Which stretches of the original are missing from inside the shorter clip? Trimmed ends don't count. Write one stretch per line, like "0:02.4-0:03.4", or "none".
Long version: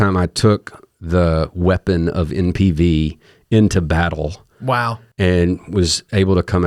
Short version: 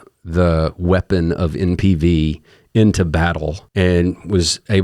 0:04.4-0:05.1